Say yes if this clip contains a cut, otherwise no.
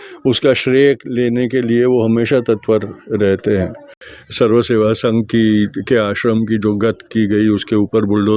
yes